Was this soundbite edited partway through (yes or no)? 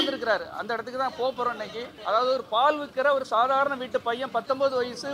yes